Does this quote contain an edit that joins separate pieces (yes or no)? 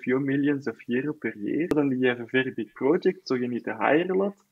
yes